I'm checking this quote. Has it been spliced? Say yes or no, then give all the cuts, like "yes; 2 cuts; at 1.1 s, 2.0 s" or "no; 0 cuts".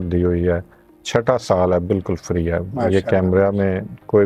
no; 0 cuts